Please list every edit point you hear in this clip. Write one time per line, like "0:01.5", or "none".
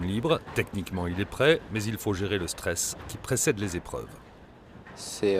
0:01.4